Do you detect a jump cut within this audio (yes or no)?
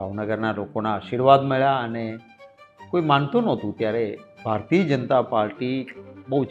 no